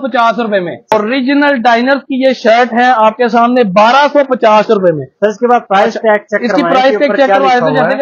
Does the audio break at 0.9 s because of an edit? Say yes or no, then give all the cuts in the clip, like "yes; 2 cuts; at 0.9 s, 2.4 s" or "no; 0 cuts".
yes; 1 cut; at 0.9 s